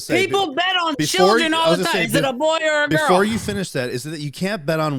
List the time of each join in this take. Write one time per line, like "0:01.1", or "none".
none